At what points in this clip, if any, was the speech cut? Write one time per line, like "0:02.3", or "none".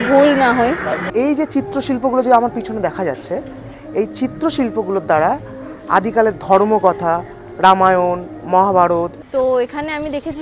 0:01.0
0:09.2

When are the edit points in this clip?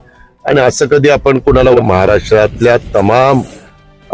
0:01.8

